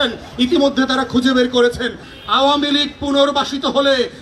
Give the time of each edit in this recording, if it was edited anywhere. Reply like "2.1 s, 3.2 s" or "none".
2.1 s